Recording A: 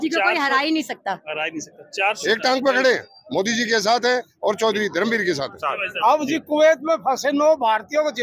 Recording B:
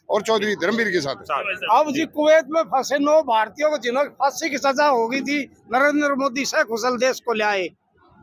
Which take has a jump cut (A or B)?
A